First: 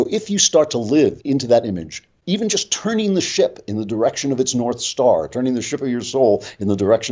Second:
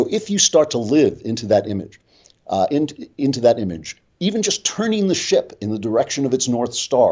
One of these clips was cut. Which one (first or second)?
first